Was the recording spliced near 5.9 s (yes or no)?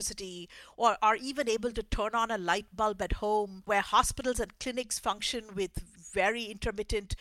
yes